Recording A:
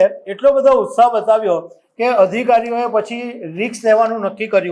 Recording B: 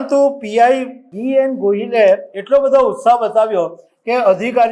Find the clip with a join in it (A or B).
B